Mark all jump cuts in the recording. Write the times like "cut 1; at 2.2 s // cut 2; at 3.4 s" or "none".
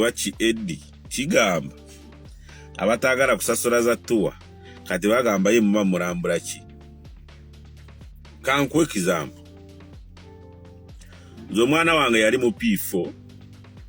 cut 1; at 6.4 s // cut 2; at 8.2 s // cut 3; at 9.4 s // cut 4; at 11.3 s